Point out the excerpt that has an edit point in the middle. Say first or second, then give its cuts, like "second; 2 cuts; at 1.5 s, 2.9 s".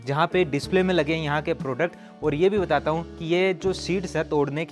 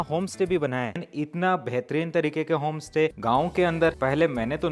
second; 3 cuts; at 1.0 s, 3.2 s, 4.0 s